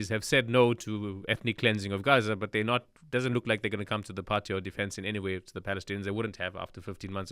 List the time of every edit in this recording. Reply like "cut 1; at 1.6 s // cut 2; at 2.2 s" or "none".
none